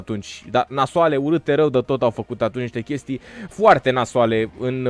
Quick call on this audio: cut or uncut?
uncut